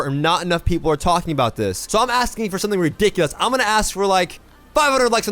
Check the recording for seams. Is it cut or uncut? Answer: cut